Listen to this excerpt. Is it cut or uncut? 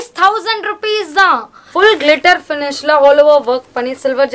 cut